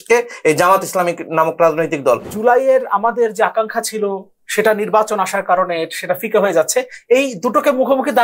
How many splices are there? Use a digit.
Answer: 1